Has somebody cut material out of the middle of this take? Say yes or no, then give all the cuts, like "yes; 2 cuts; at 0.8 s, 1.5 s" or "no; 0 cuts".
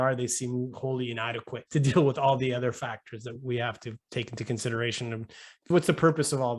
yes; 1 cut; at 1.6 s